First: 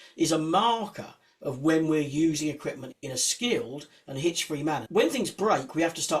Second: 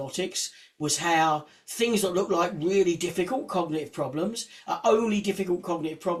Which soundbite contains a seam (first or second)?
first